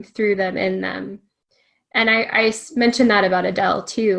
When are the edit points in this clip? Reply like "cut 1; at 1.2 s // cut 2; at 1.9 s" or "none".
none